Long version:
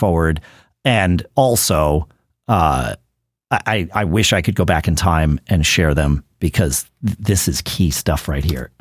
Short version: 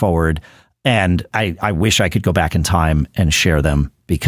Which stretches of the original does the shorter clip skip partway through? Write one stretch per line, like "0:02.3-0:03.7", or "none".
0:01.3-0:03.6